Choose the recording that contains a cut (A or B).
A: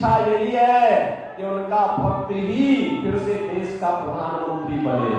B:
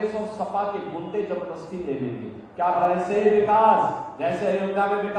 B